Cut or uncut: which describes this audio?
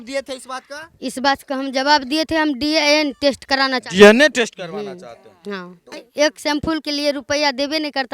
cut